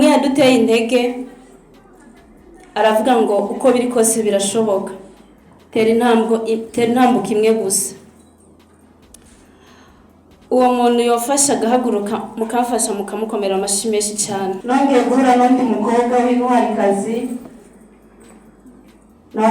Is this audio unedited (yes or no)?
no